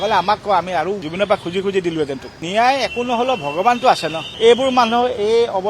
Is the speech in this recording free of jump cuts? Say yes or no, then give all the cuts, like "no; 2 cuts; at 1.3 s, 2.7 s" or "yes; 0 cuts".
no; 2 cuts; at 2.4 s, 4.3 s